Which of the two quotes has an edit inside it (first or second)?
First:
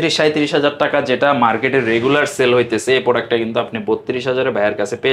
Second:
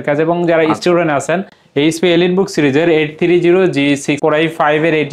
second